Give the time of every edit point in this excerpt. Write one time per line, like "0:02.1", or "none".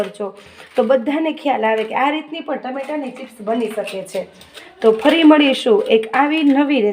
none